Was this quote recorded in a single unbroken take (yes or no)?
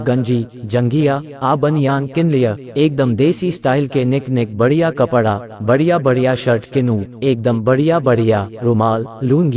no